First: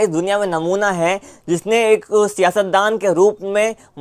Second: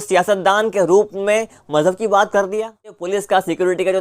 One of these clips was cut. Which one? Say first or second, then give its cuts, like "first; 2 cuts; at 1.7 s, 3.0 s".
second; 1 cut; at 3.0 s